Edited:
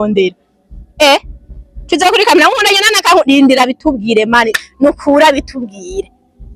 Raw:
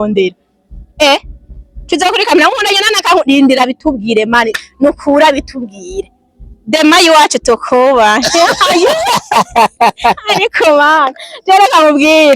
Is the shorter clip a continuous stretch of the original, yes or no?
yes